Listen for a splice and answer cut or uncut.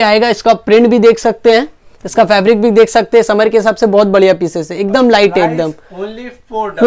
uncut